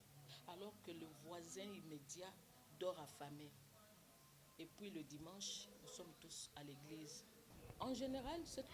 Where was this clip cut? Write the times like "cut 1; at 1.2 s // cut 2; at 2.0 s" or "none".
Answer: cut 1; at 7.5 s